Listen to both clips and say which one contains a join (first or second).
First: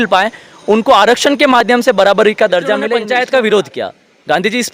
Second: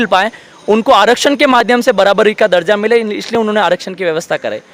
first